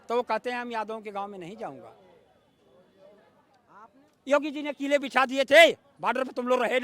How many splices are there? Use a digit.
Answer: 1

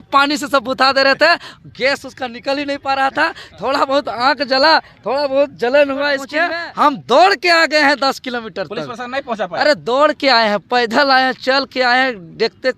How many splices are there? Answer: 1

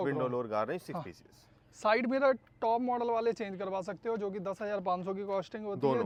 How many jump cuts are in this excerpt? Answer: 0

